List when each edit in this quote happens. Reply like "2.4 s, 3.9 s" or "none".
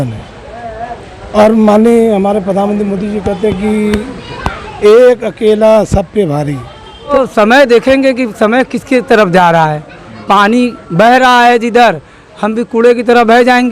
7.2 s